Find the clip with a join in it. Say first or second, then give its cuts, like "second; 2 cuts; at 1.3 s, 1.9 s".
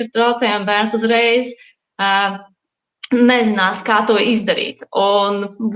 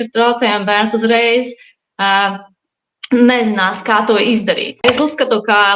second; 1 cut; at 4.8 s